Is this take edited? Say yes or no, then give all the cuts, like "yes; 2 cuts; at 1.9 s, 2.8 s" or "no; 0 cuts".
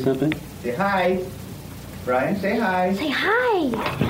no; 0 cuts